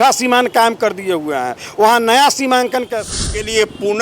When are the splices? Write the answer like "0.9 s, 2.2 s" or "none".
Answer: 2.9 s